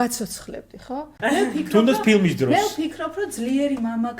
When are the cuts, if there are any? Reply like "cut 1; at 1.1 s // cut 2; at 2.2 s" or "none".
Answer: cut 1; at 1.1 s